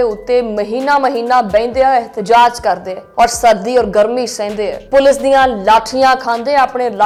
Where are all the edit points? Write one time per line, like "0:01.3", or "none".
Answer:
none